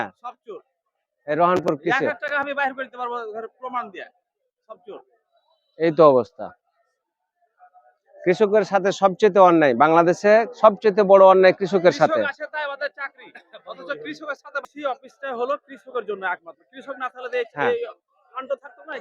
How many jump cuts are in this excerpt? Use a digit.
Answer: 1